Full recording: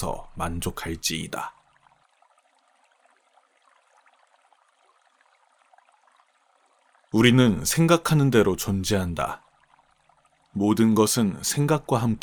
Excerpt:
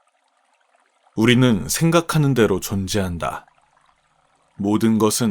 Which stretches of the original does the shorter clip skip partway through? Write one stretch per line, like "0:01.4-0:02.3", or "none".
0:03.4-0:07.1